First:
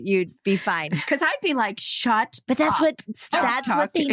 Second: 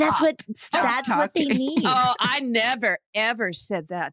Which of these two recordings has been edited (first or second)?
first